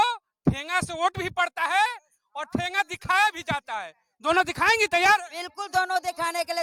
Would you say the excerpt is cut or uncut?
uncut